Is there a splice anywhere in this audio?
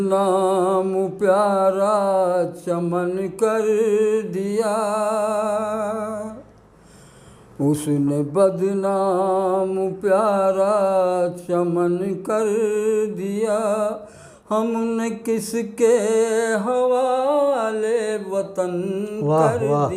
no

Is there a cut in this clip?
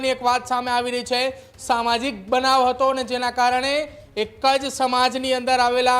no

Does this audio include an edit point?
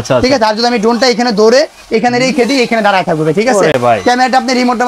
no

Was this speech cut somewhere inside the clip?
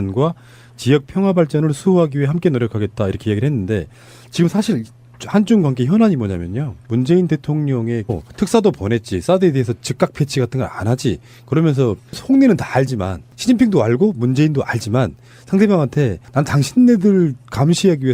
no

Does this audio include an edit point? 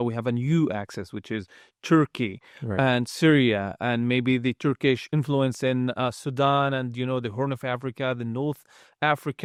no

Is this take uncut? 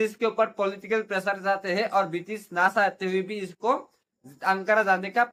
yes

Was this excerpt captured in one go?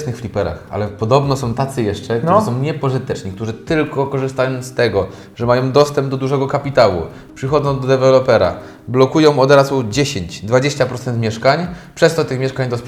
yes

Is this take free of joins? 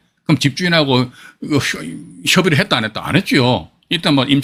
yes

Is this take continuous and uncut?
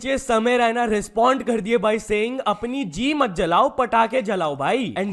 no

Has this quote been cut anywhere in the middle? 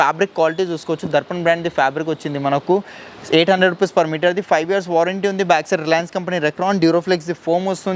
no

